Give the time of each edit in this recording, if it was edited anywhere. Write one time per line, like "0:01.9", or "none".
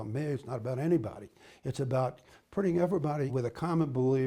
0:03.3